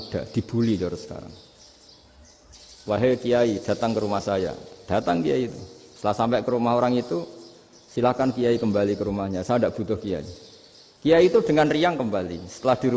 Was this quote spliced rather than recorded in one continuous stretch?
no; 0 cuts

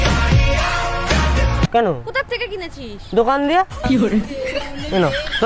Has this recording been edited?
yes; 1 cut; at 1.7 s

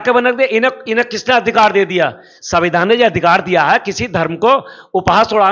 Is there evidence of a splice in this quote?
no; 0 cuts

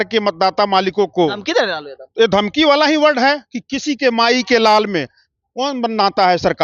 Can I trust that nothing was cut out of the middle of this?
yes; 0 cuts

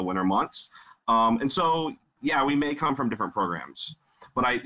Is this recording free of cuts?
yes; 0 cuts

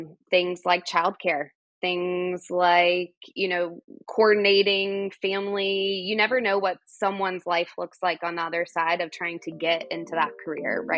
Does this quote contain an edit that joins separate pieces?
no; 0 cuts

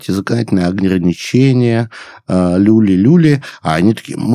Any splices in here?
no; 0 cuts

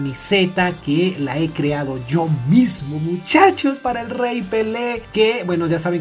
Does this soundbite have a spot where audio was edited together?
no; 0 cuts

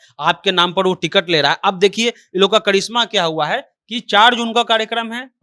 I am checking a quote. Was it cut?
no; 0 cuts

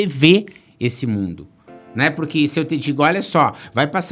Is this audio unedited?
yes; 0 cuts

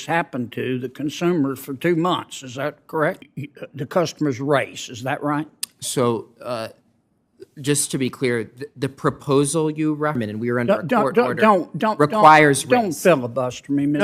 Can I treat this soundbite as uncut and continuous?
no; 2 cuts; at 3.2 s, 10.2 s

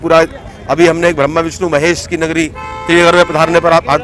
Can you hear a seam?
no; 0 cuts

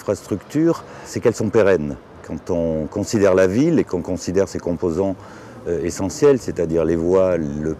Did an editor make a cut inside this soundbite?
yes; 1 cut; at 1.1 s

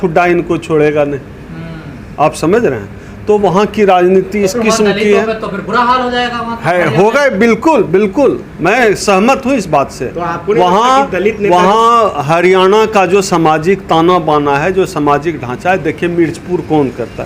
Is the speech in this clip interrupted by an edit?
no; 0 cuts

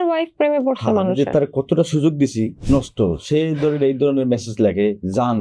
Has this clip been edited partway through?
yes; 1 cut; at 2.6 s

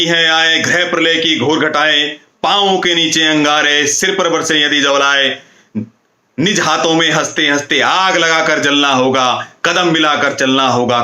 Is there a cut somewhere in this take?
no; 0 cuts

